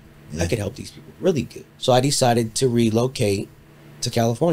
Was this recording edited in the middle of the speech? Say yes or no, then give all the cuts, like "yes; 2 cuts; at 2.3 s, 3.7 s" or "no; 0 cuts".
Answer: yes; 1 cut; at 1.6 s